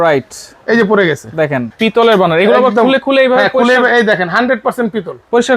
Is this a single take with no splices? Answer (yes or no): no